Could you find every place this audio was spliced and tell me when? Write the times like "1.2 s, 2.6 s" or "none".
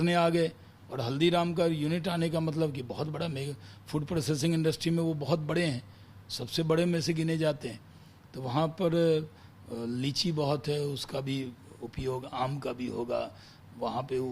none